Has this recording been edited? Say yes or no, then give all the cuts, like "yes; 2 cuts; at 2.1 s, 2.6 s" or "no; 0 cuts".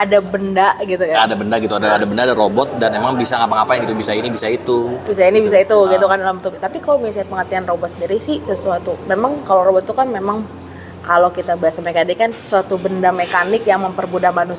no; 0 cuts